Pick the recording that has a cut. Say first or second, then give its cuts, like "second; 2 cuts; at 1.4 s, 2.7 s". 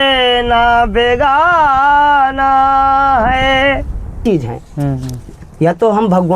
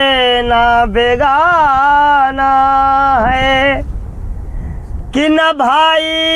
first; 1 cut; at 4.2 s